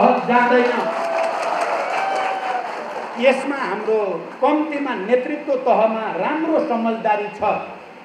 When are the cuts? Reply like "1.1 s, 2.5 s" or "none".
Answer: none